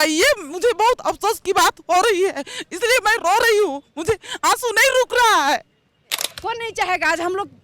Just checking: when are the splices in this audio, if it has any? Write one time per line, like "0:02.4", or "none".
0:06.2